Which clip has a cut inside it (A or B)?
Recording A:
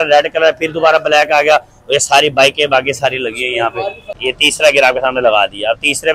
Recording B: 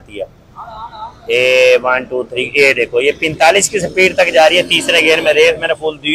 A